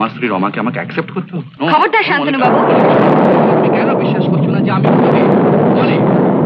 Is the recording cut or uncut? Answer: cut